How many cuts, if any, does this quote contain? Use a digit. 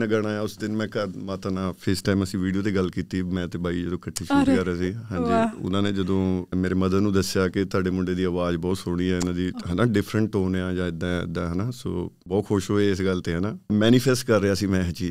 3